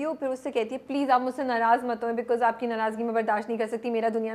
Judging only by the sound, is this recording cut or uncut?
uncut